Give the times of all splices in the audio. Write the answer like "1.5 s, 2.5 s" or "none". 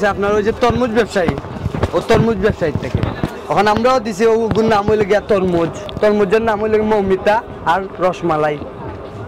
none